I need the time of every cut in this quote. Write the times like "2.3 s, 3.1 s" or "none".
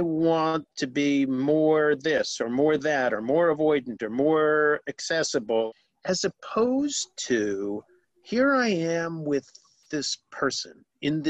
5.7 s